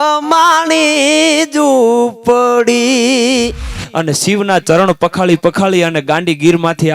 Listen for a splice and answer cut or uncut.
cut